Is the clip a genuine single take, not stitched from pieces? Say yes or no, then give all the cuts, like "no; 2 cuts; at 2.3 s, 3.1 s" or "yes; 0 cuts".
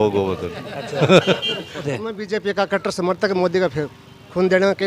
no; 1 cut; at 1.9 s